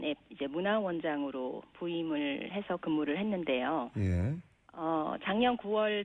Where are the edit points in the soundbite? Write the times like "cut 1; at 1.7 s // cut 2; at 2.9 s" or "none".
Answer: cut 1; at 5.1 s